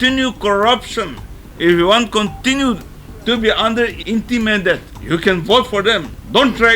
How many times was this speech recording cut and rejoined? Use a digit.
2